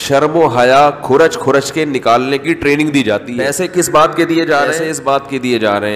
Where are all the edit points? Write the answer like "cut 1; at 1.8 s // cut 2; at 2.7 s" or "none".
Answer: cut 1; at 3.3 s